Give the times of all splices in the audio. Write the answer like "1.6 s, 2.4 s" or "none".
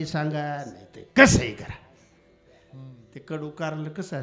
none